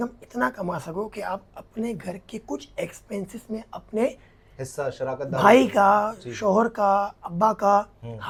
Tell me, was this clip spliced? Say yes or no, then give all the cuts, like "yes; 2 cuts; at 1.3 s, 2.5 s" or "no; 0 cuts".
no; 0 cuts